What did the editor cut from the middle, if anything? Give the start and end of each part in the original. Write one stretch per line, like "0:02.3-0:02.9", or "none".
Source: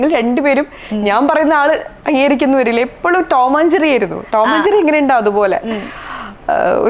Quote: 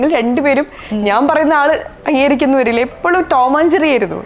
none

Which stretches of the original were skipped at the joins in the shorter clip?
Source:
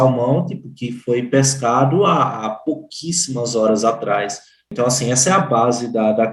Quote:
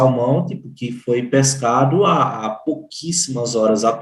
none

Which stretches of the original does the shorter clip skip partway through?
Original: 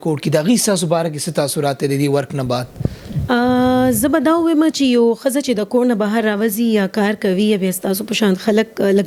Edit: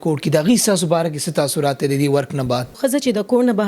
0:02.8-0:05.2

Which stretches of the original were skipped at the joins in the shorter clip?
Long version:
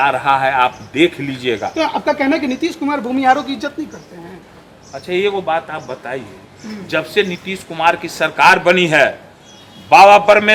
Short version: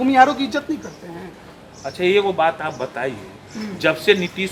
none

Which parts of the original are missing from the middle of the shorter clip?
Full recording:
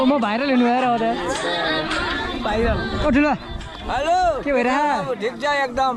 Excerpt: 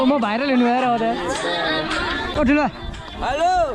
0:02.3-0:03.0

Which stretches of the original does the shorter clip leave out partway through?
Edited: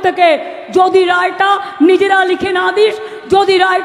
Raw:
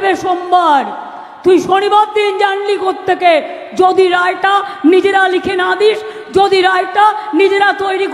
none

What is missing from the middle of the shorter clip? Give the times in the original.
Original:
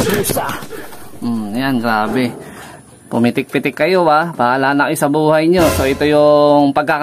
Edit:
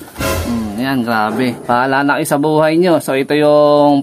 0:02.4-0:04.3

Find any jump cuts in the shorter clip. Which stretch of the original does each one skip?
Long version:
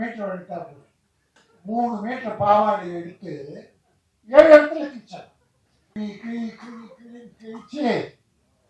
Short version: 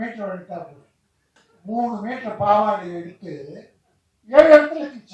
none

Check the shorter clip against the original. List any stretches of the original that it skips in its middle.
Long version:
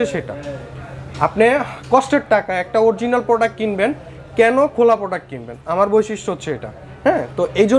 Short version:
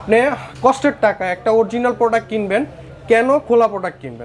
none

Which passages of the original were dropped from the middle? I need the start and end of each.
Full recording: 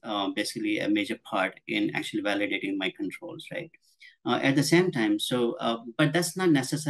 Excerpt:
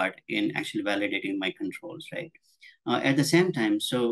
none

